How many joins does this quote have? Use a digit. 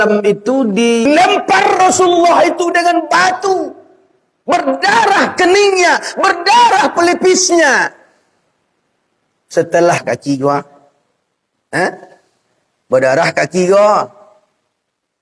2